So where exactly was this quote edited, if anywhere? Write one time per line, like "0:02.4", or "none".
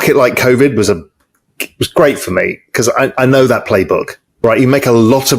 0:04.2